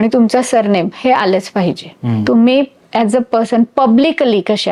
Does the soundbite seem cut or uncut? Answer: cut